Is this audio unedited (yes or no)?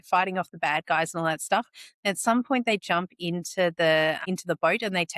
no